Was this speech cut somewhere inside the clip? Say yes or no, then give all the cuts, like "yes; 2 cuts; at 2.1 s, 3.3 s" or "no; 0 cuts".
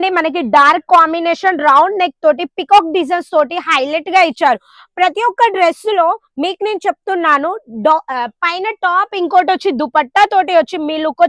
no; 0 cuts